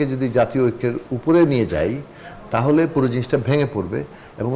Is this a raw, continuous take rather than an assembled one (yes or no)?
yes